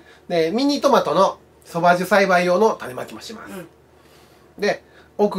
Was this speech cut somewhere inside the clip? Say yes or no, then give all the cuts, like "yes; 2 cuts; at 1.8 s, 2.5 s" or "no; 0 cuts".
no; 0 cuts